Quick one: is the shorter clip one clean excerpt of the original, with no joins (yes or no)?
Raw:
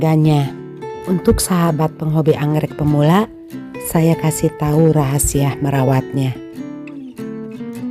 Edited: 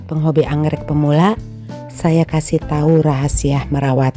yes